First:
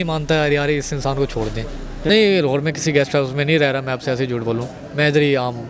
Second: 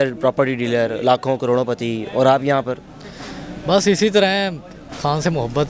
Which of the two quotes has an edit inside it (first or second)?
first